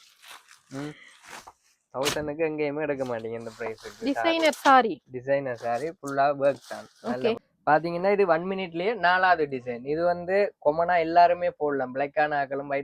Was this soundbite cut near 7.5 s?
yes; 1 cut; at 7.5 s

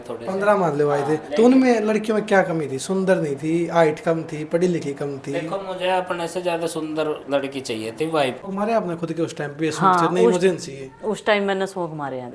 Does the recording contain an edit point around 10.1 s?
no; 1 cut; at 8.4 s

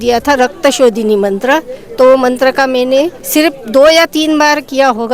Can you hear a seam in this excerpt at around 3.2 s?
yes; 1 cut; at 3.2 s

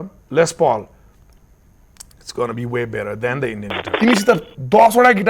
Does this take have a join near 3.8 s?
yes; 1 cut; at 3.8 s

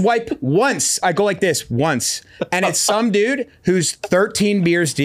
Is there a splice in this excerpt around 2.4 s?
no; 1 cut; at 0.9 s

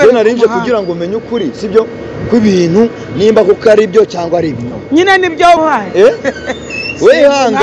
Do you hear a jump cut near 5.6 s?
yes; 1 cut; at 5.6 s

